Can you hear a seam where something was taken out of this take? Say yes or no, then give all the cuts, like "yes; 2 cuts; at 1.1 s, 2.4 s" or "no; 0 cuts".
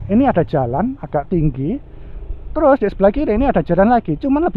no; 0 cuts